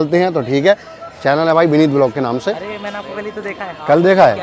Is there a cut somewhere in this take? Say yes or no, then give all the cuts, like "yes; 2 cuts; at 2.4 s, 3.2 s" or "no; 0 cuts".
no; 0 cuts